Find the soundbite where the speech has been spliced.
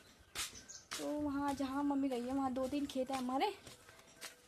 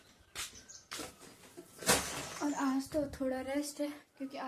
second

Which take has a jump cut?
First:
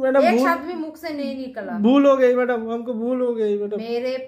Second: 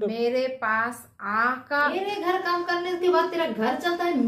second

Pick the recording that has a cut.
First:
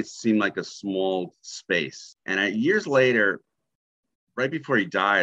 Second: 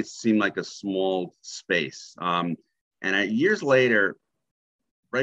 first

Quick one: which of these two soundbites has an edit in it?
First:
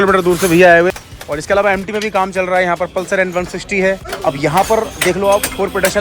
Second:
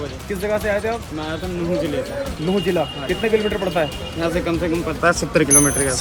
first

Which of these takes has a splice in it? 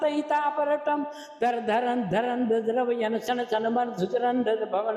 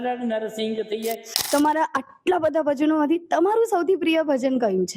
second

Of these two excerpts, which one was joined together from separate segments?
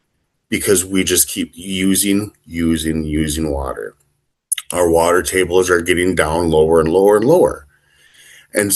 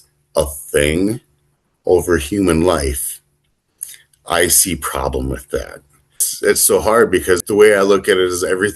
second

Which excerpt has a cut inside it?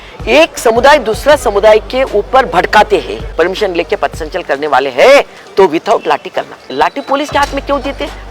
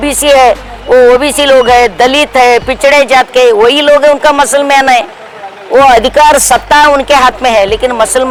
first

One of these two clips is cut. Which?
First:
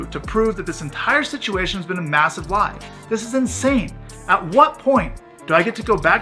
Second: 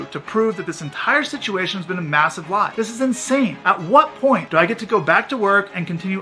second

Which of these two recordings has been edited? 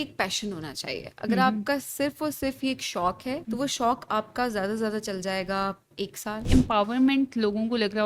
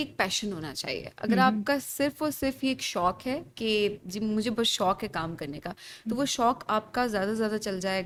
first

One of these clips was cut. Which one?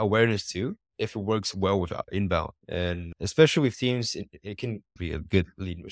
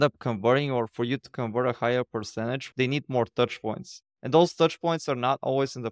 first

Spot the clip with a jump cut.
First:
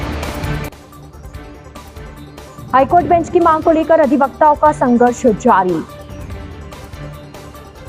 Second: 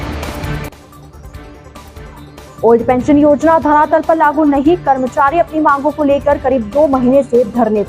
second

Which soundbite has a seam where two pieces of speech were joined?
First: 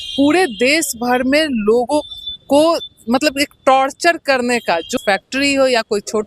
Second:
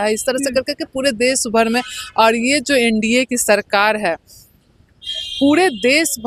first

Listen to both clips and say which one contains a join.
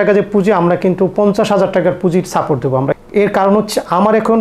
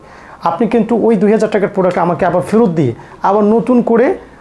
first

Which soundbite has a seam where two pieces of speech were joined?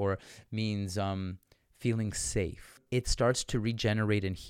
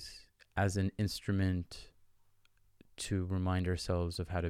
first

